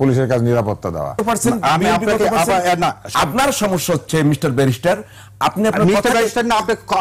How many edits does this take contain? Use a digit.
2